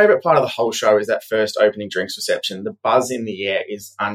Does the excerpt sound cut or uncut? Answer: uncut